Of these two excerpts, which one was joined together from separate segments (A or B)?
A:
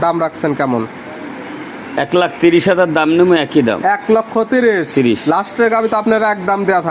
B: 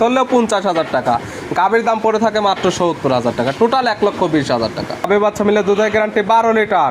B